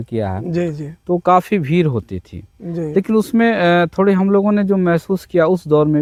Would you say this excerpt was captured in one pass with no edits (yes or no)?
yes